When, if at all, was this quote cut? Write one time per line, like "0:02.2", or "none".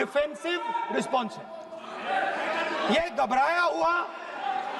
none